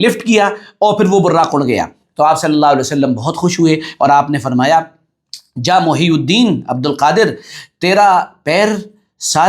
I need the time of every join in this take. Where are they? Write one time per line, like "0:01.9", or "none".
none